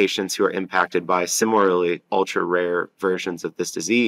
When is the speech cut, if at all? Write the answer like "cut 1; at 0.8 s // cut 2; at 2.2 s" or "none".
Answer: cut 1; at 1.3 s